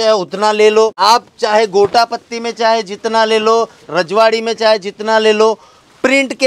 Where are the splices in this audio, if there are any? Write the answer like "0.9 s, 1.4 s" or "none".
1.0 s